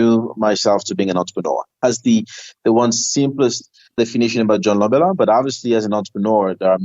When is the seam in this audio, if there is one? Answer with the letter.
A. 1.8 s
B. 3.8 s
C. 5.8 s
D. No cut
A